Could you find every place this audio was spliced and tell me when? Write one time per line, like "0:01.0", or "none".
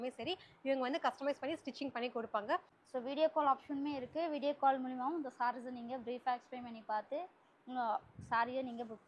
0:02.8